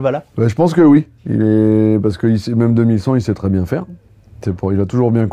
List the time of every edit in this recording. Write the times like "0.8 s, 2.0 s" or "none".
none